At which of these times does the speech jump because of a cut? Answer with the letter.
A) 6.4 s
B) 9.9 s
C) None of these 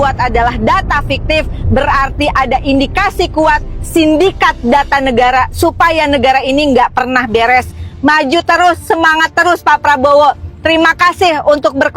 C